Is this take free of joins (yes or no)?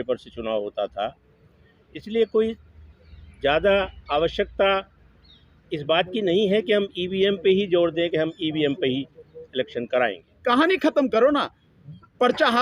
no